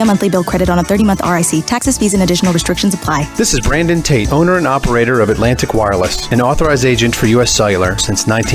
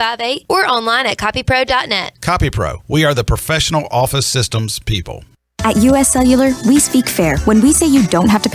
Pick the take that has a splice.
second; 1 cut; at 5.4 s

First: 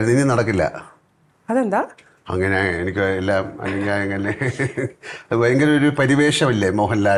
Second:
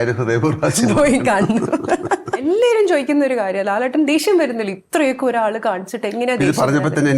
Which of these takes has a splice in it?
second; 1 cut; at 2.4 s

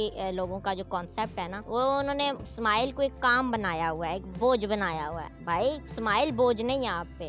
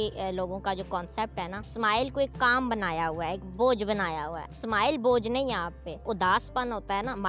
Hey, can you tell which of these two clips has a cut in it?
second; 3 cuts; at 1.6 s, 4.5 s, 6.0 s

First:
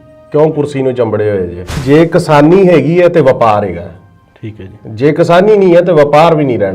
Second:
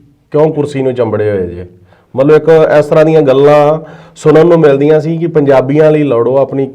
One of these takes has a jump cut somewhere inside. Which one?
first; 1 cut; at 1.7 s

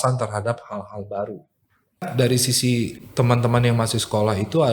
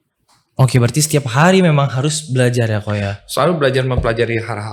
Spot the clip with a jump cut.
first; 1 cut; at 2.1 s

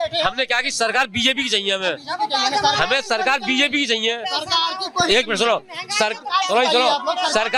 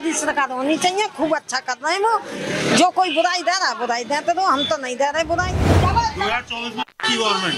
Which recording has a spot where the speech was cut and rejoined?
second; 1 cut; at 5.6 s

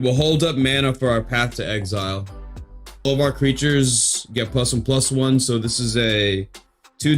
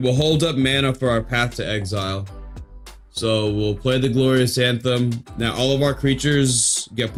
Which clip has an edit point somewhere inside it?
first; 1 cut; at 3.1 s

